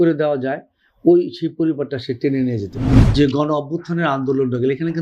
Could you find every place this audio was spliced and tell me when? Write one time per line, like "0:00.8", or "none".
0:02.9